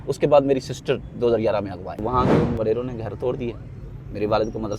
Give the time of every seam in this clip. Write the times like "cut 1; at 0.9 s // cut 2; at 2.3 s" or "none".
cut 1; at 2.1 s